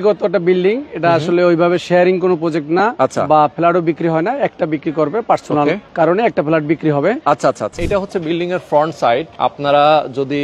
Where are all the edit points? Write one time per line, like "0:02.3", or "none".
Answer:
0:05.8
0:07.8
0:09.3